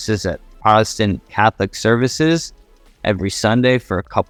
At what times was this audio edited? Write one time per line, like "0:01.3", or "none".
none